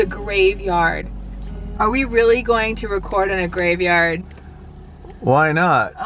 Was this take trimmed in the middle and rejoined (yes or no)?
no